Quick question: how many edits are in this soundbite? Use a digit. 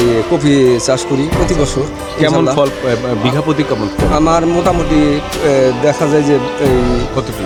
0